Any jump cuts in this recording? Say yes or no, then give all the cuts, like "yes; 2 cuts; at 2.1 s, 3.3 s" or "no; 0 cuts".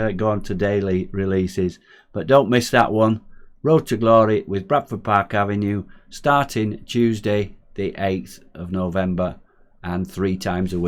no; 0 cuts